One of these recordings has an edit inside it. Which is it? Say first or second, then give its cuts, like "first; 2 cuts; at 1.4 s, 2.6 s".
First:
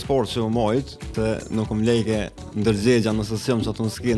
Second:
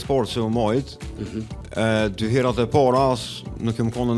first; 1 cut; at 1.0 s